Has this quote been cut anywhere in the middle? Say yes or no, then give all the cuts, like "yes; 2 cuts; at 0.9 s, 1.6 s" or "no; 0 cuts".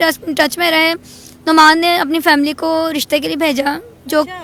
no; 0 cuts